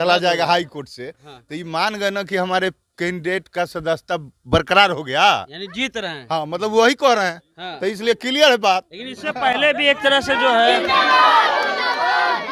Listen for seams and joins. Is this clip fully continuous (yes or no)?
yes